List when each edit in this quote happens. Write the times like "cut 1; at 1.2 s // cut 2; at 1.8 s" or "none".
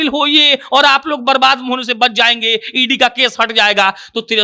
none